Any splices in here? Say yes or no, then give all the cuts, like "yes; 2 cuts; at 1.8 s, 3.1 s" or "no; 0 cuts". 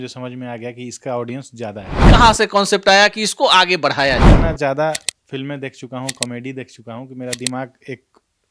yes; 2 cuts; at 2.1 s, 4.3 s